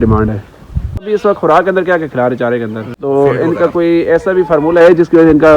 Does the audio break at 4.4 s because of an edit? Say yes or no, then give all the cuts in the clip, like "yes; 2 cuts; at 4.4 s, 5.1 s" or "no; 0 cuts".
no; 2 cuts; at 1.0 s, 2.9 s